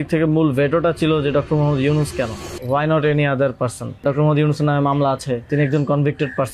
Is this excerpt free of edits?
no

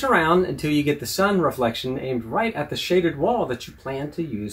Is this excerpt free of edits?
yes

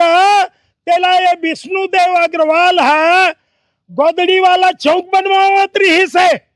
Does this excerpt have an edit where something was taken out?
no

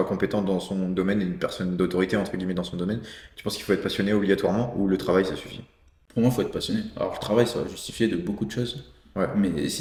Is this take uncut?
yes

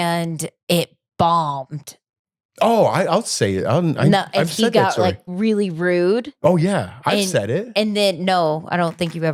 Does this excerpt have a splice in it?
no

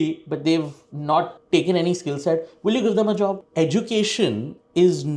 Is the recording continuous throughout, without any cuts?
no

